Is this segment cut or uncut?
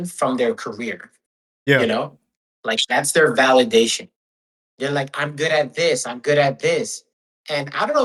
uncut